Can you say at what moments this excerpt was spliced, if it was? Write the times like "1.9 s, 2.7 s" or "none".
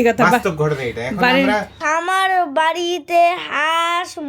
1.7 s